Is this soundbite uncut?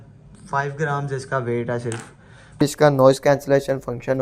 no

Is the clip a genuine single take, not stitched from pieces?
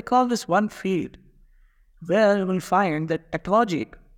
yes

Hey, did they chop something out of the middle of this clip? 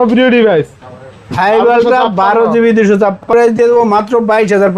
yes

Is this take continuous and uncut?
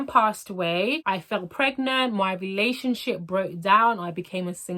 no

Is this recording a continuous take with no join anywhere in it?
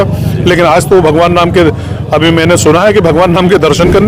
yes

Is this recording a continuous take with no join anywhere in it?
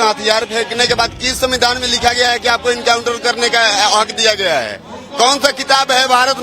yes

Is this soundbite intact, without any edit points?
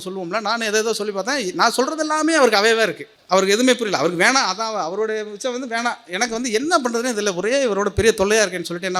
no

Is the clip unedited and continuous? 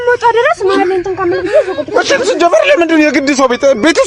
yes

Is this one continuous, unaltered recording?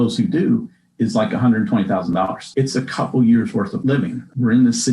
no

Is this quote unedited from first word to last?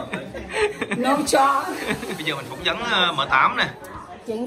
no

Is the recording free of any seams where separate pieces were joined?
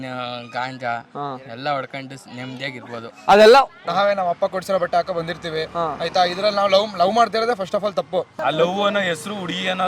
no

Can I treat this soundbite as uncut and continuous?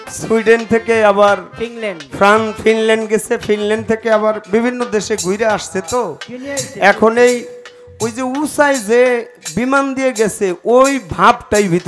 yes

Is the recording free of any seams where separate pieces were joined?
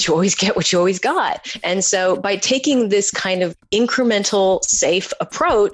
no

